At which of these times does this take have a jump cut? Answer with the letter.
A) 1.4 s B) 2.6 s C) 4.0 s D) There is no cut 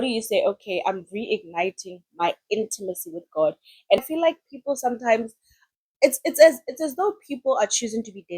C